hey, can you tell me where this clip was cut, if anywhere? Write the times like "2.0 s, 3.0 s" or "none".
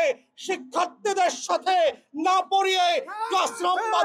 none